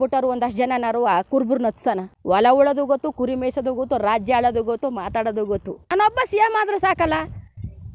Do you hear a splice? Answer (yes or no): yes